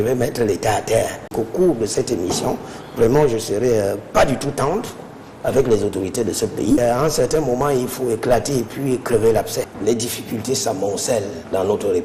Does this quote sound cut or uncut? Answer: cut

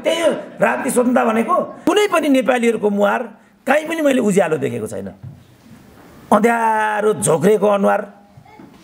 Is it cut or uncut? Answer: cut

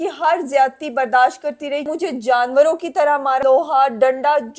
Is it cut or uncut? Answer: cut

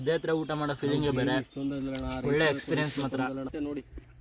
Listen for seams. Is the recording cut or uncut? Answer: cut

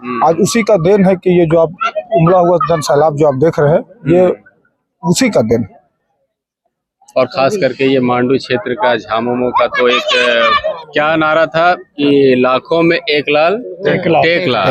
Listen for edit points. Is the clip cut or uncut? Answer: uncut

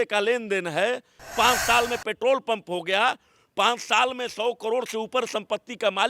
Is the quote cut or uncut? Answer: cut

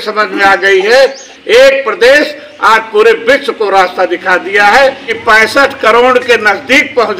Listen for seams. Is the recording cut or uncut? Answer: cut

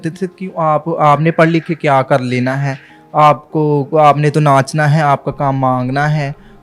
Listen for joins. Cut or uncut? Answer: uncut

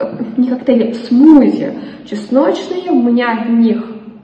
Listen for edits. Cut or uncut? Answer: uncut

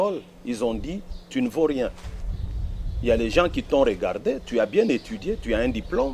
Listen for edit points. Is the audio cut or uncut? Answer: uncut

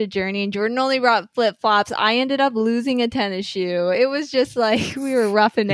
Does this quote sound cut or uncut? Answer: uncut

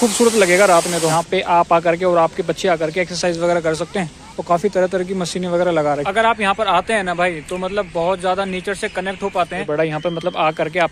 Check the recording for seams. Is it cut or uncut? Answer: cut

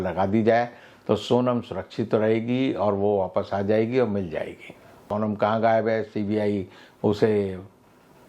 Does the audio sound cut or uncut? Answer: cut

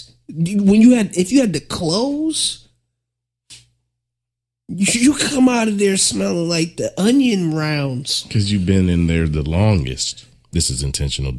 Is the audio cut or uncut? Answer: cut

